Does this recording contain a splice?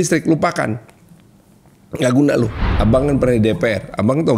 yes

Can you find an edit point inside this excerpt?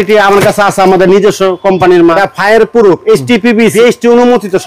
yes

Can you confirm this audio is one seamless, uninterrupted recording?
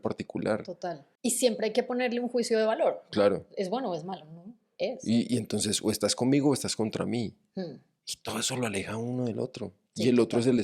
no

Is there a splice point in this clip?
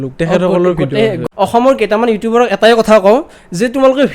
yes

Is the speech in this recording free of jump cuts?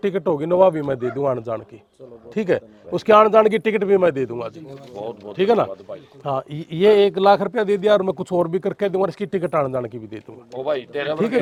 yes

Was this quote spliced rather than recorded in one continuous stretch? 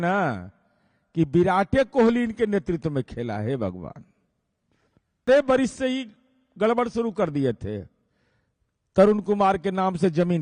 yes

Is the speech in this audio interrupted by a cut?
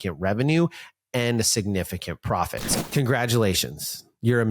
yes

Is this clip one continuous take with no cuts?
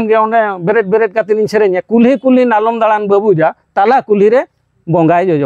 yes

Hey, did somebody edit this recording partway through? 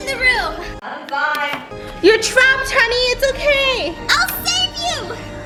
no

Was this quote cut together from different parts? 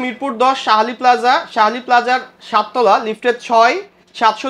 no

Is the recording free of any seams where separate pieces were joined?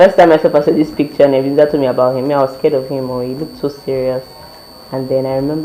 yes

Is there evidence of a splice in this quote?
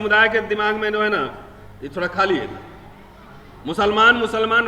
no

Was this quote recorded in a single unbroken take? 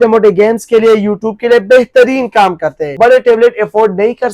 no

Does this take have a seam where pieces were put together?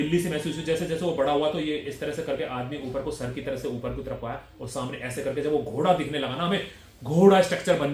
no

